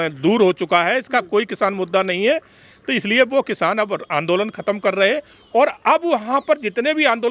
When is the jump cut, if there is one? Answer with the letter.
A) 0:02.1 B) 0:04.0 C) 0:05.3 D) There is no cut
C